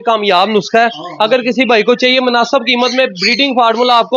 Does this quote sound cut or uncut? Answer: uncut